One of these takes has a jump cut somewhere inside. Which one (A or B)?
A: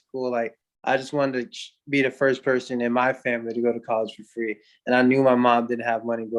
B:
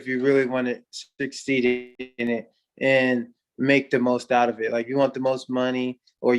B